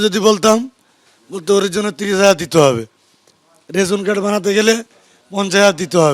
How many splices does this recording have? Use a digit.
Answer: 0